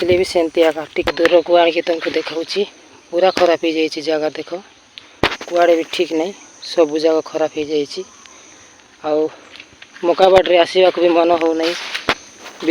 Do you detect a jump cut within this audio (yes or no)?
yes